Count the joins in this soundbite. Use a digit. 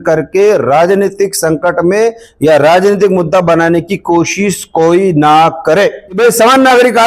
1